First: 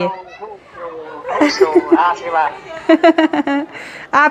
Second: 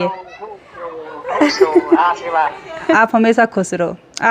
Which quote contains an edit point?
second; 1 cut; at 2.9 s

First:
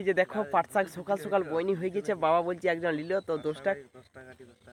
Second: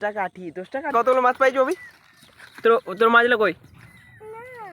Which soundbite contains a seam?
second; 1 cut; at 0.9 s

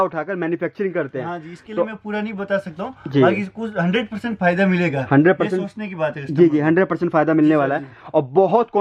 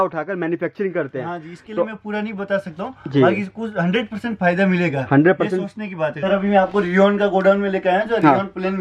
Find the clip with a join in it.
second; 1 cut; at 6.1 s

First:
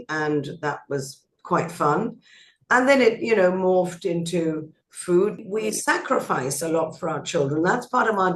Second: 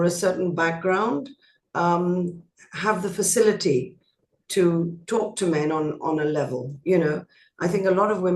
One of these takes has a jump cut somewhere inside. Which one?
first; 1 cut; at 5.4 s

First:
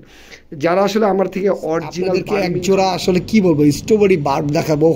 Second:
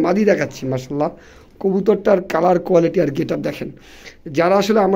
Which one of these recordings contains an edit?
first; 1 cut; at 2.2 s

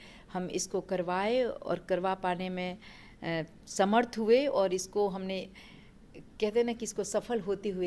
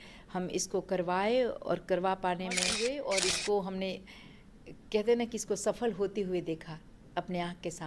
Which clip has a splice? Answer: second; 1 cut; at 2.7 s

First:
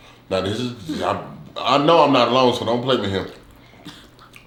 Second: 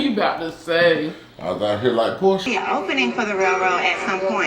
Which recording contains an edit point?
second; 1 cut; at 2.5 s

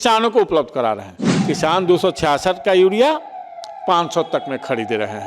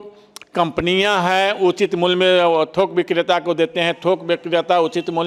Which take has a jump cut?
first; 1 cut; at 1.3 s

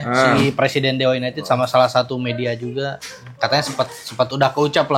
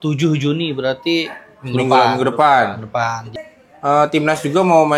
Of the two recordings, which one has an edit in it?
second; 1 cut; at 3.3 s

